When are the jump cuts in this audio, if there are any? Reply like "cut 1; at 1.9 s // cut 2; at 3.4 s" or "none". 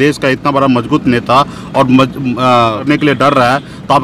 cut 1; at 2.8 s